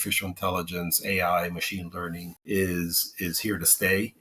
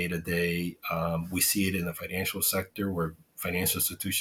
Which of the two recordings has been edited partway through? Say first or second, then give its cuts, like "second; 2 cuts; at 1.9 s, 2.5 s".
first; 1 cut; at 2.3 s